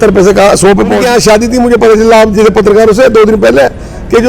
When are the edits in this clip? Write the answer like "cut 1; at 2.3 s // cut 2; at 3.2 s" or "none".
cut 1; at 1.0 s